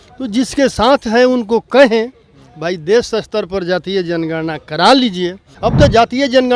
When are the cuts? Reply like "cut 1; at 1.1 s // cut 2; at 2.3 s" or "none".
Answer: cut 1; at 5.4 s